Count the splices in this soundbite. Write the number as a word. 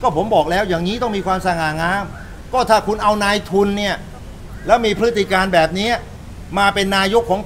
zero